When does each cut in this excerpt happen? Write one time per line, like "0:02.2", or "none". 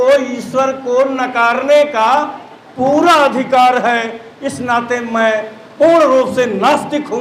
none